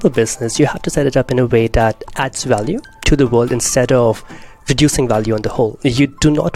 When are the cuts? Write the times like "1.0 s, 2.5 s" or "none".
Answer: 3.0 s